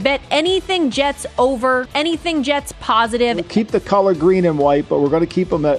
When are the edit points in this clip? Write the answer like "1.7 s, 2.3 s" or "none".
1.9 s, 3.5 s